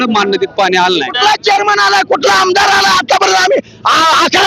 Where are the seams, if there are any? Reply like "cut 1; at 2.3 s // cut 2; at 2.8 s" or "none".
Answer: cut 1; at 1.1 s